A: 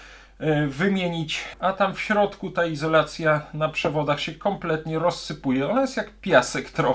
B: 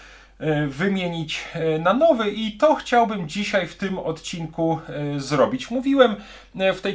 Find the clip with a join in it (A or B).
A